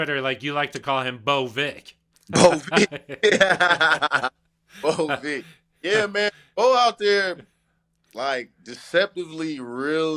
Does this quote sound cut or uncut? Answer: uncut